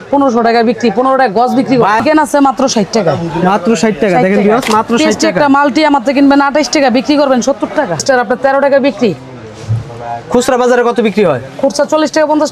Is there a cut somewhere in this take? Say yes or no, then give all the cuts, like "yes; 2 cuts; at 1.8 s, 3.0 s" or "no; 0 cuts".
yes; 2 cuts; at 2.0 s, 8.0 s